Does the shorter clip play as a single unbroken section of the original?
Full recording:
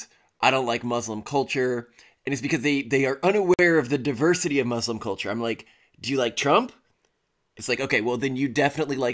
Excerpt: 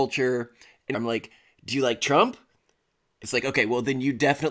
no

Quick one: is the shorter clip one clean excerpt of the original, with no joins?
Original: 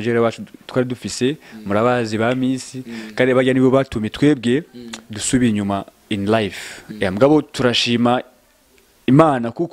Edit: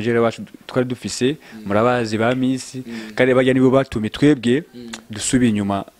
yes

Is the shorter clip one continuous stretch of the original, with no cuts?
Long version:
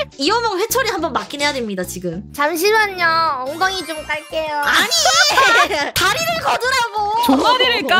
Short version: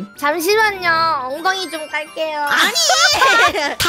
yes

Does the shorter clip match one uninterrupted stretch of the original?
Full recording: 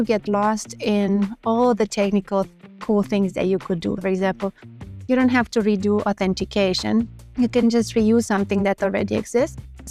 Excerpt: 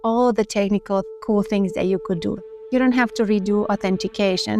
no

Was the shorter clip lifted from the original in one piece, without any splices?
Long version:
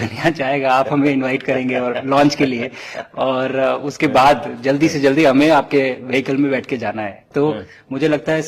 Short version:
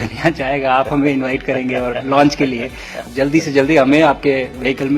no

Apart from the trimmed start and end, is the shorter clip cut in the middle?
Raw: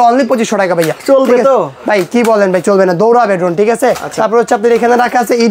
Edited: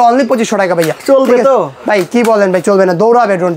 no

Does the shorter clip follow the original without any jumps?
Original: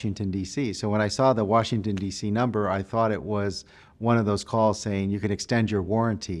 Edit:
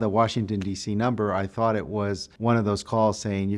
no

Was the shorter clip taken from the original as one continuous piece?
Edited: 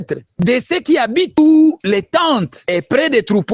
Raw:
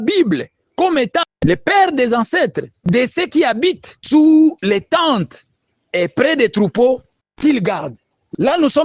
no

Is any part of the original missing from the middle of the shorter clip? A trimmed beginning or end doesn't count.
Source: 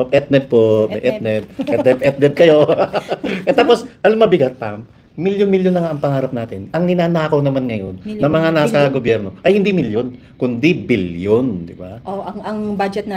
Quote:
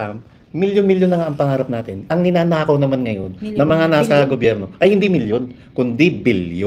no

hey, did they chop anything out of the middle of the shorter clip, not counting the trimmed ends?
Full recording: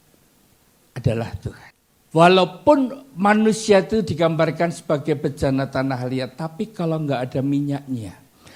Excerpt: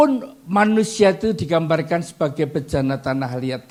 no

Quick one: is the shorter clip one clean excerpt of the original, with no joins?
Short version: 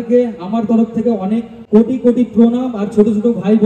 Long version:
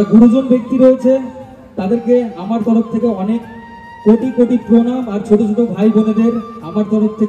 no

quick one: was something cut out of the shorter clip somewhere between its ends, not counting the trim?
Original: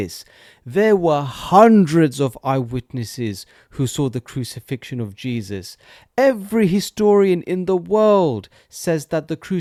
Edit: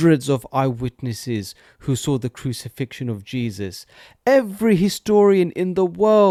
no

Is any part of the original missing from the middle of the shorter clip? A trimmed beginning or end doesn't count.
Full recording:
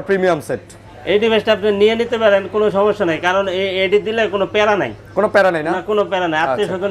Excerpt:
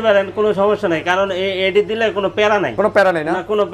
yes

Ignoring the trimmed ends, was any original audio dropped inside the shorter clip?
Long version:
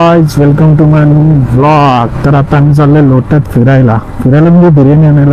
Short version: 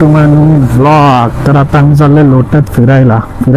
no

